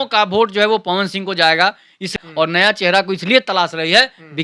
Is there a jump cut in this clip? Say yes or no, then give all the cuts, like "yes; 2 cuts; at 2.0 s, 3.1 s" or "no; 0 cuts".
yes; 1 cut; at 2.2 s